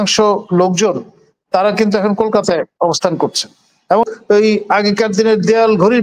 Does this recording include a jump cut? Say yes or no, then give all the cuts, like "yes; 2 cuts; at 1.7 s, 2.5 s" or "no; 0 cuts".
yes; 1 cut; at 4.1 s